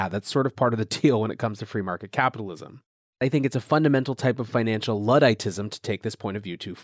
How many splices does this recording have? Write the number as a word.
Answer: one